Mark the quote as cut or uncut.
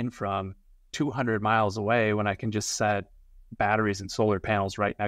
uncut